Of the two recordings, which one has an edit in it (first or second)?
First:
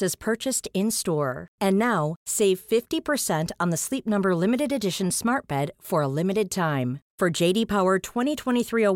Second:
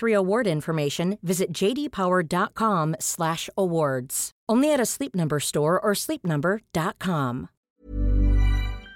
second